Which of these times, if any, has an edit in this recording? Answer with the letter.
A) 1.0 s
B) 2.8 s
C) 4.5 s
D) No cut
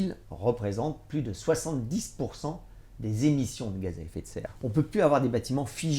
C